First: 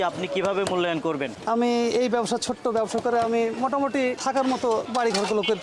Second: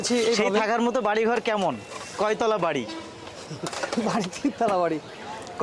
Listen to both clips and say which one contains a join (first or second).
first